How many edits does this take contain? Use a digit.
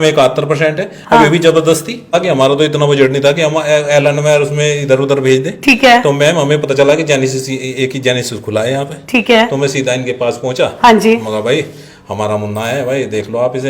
1